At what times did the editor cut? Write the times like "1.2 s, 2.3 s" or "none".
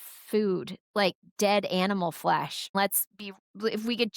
2.7 s